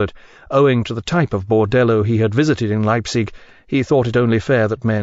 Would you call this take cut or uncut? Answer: uncut